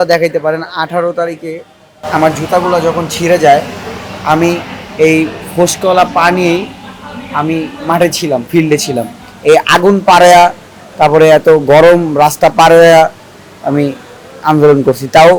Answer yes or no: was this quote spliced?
no